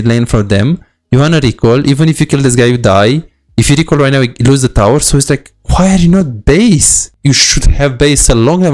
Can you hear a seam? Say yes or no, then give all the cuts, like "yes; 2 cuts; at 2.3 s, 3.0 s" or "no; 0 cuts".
yes; 1 cut; at 7.0 s